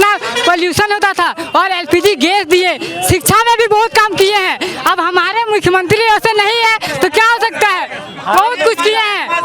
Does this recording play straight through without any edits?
yes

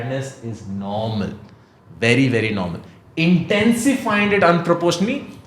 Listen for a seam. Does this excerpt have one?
no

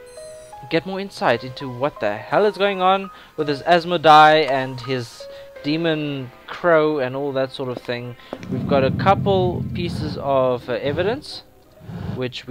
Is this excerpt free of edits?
no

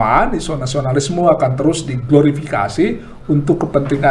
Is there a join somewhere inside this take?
no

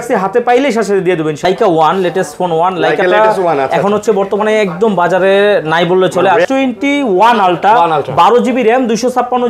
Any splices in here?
yes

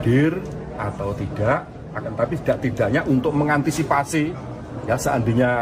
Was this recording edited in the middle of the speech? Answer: no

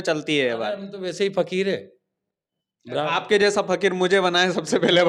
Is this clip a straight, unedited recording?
yes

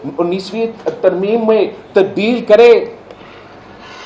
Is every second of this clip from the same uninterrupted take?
yes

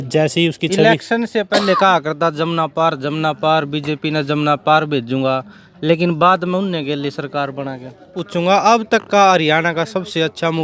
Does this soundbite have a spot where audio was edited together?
yes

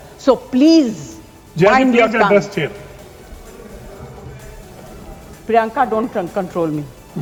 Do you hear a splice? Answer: no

